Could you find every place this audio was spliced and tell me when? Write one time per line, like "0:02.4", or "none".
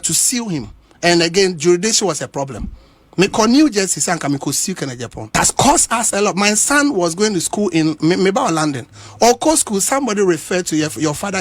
0:05.3